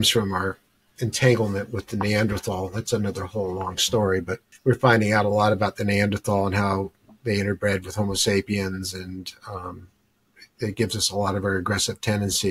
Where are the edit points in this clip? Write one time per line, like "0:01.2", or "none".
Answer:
0:04.4